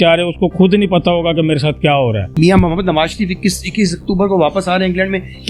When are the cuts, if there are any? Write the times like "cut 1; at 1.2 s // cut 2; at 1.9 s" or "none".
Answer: cut 1; at 2.3 s

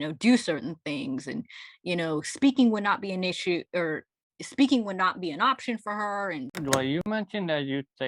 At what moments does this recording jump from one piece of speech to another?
cut 1; at 6.5 s

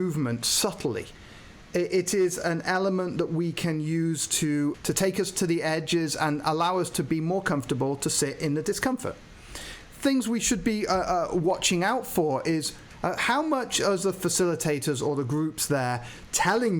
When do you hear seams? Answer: cut 1; at 4.8 s // cut 2; at 12.8 s

